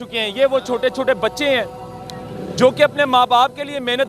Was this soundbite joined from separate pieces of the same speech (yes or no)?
no